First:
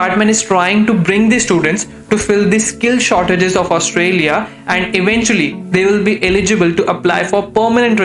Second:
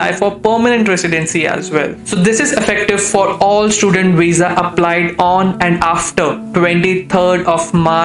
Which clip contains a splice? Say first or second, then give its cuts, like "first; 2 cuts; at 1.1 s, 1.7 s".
second; 1 cut; at 2.0 s